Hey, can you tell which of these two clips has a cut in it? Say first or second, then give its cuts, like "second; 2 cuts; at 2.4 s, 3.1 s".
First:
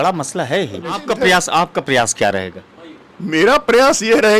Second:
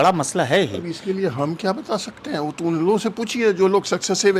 first; 1 cut; at 1.0 s